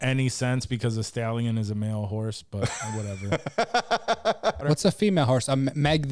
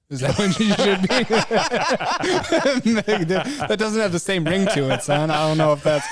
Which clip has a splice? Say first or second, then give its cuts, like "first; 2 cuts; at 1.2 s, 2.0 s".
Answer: first; 1 cut; at 4.6 s